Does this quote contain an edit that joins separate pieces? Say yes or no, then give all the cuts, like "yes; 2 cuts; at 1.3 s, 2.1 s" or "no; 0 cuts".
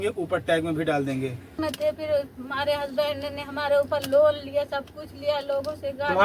yes; 1 cut; at 1.6 s